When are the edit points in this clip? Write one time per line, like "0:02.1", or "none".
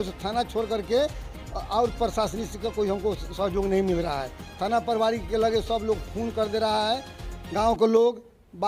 none